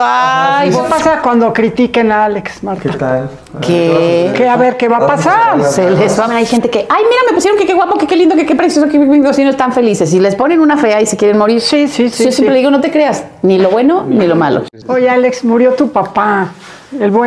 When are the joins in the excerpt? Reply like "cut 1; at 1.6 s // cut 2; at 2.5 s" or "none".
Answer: cut 1; at 0.8 s // cut 2; at 6.3 s // cut 3; at 14.7 s